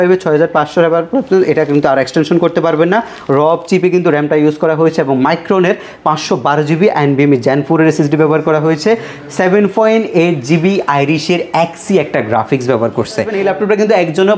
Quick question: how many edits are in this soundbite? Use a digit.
1